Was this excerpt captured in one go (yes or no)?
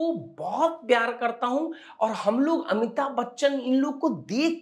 yes